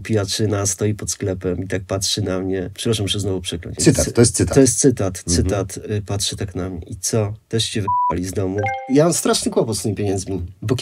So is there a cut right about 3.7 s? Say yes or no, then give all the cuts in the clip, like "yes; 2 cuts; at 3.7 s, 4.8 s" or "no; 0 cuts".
yes; 2 cuts; at 3.7 s, 8.8 s